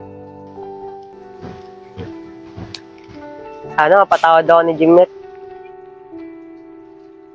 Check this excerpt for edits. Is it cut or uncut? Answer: uncut